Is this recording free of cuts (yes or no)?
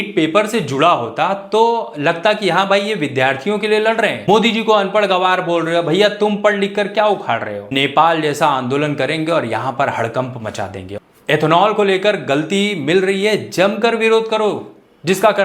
no